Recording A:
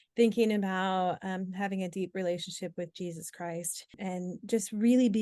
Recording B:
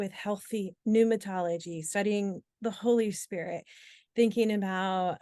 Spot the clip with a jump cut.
A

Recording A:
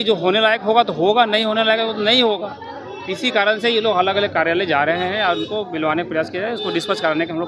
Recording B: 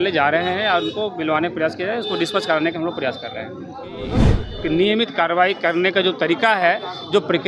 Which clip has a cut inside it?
B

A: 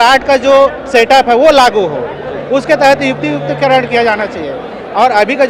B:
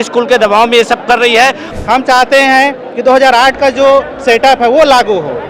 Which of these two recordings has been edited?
B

